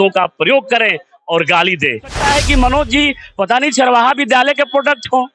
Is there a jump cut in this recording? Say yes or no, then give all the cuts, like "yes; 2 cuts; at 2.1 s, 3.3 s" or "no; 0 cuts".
yes; 1 cut; at 2.2 s